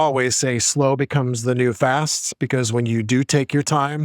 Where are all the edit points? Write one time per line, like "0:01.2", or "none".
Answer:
none